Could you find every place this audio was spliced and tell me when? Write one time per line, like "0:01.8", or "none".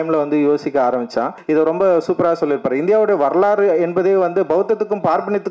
0:01.4